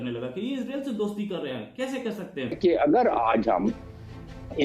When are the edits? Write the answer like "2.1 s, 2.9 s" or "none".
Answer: 2.6 s